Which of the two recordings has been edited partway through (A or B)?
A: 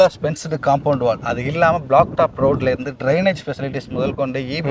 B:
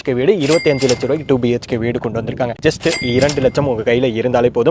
B